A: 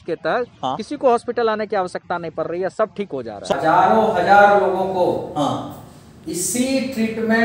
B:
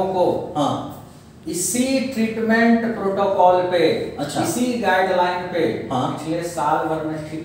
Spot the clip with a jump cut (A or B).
A